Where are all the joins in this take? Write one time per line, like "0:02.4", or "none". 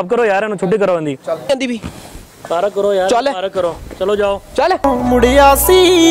0:01.5
0:04.8